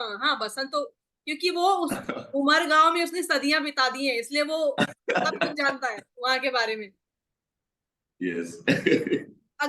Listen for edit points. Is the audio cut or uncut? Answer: uncut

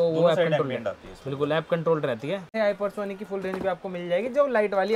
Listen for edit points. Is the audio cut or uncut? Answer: cut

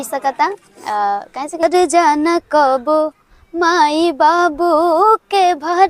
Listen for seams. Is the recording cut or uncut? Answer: cut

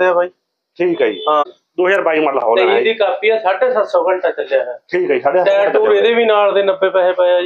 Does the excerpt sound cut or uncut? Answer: cut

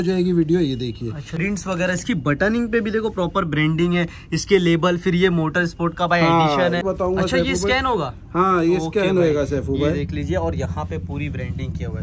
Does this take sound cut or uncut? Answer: cut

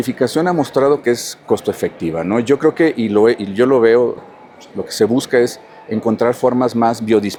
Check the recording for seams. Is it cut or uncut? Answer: uncut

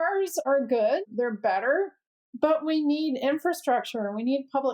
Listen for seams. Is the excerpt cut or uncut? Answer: uncut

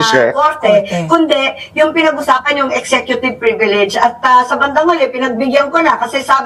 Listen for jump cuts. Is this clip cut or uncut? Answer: uncut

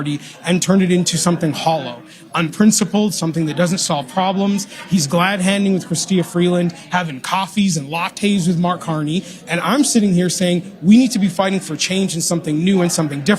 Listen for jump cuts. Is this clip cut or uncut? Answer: uncut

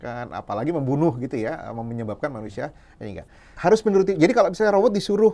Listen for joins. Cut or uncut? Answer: cut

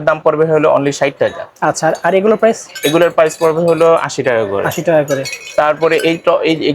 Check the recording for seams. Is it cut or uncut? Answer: uncut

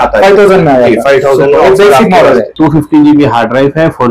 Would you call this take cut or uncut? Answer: cut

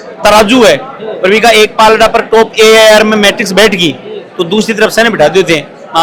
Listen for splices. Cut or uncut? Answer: uncut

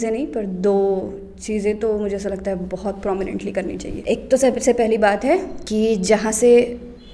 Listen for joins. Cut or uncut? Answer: cut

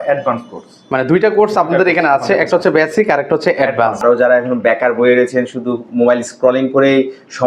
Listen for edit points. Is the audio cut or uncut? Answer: cut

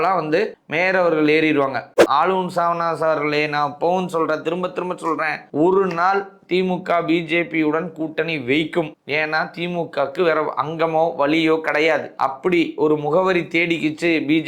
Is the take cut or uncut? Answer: cut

